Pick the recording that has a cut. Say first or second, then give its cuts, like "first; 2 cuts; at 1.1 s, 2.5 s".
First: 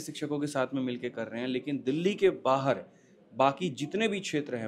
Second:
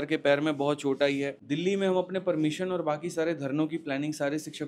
second; 1 cut; at 1.4 s